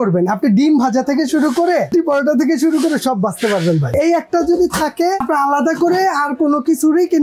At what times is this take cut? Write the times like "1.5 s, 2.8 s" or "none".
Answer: 1.9 s, 3.9 s, 5.2 s